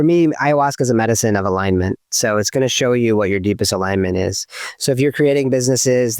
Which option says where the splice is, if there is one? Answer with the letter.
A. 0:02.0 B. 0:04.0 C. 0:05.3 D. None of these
D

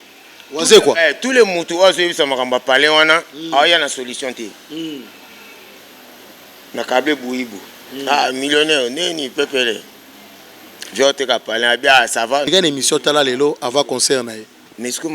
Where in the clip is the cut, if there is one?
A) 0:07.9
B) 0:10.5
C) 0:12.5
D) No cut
C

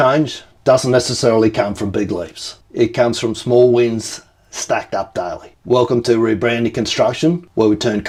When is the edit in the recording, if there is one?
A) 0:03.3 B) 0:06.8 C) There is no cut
C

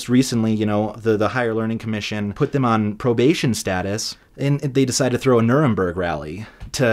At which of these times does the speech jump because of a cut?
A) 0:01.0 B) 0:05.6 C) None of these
A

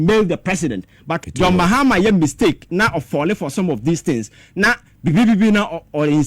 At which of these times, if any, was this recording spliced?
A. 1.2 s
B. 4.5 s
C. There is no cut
A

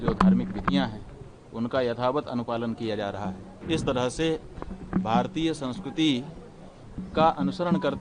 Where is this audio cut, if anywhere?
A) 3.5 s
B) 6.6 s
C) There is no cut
A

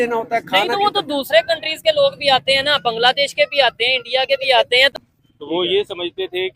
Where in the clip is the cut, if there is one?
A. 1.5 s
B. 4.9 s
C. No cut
B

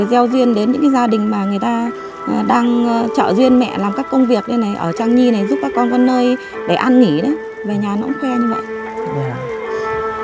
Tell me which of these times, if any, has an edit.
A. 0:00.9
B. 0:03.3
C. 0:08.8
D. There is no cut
D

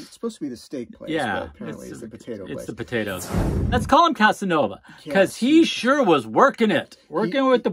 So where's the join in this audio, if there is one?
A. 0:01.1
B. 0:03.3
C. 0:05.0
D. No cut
B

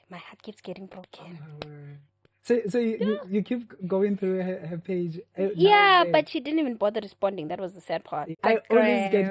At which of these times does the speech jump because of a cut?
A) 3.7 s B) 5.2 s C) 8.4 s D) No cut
C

